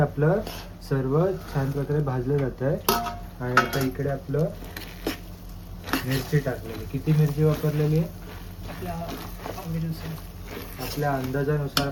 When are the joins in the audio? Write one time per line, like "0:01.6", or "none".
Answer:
none